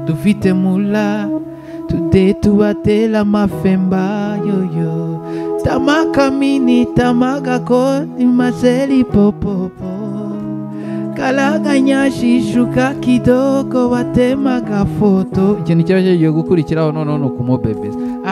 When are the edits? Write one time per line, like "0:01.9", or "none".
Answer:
none

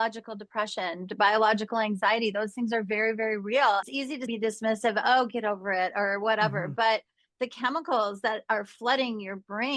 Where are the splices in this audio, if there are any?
0:03.8

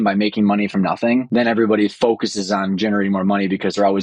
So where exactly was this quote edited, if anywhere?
0:01.3

